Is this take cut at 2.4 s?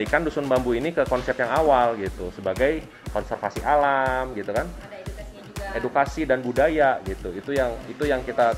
no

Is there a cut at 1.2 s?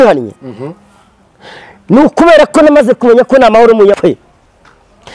no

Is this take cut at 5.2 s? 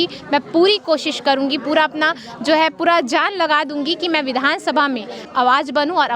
yes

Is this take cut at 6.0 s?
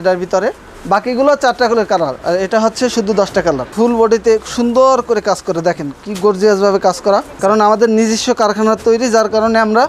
no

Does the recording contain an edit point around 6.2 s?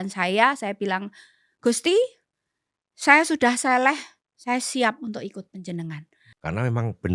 yes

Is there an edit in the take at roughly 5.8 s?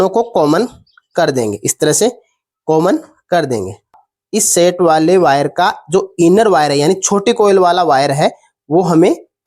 no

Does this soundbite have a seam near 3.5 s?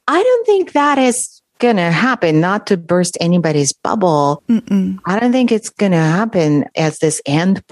no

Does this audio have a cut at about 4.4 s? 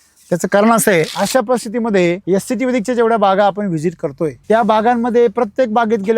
yes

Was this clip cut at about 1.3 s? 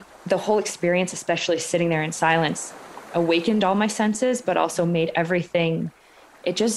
no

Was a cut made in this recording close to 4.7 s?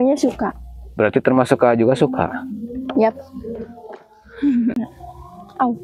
yes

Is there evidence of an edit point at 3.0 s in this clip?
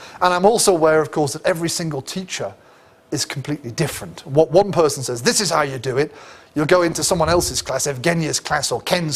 no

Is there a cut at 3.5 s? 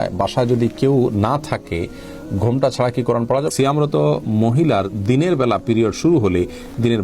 yes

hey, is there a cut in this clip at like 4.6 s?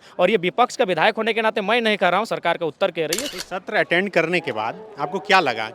no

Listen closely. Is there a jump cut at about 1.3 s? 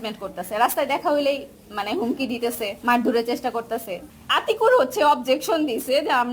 no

